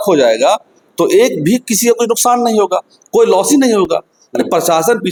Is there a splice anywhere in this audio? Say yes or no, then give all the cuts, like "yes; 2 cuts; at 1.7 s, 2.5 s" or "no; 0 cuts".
no; 0 cuts